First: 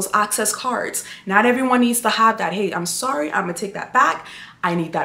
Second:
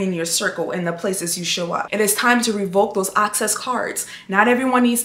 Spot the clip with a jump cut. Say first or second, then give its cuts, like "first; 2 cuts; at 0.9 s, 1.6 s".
second; 1 cut; at 1.9 s